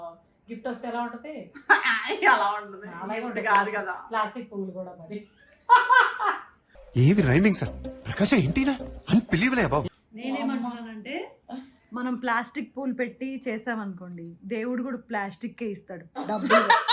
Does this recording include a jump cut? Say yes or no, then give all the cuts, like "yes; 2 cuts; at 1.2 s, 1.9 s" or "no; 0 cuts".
no; 0 cuts